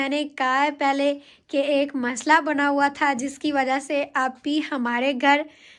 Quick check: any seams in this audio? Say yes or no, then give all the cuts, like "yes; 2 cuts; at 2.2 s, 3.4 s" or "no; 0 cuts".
no; 0 cuts